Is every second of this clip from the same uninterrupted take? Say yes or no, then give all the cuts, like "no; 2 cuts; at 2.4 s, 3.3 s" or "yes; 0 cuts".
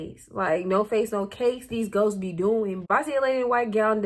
no; 1 cut; at 2.8 s